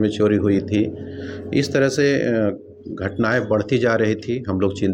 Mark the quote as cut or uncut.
uncut